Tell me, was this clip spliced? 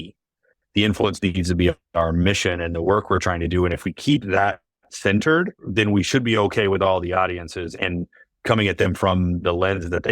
yes; 3 cuts; at 5.7 s, 7.7 s, 9.4 s

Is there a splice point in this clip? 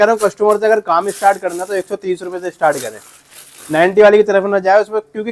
no; 0 cuts

